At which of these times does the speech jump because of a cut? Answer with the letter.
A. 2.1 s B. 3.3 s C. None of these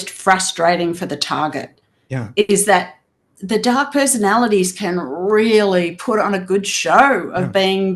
B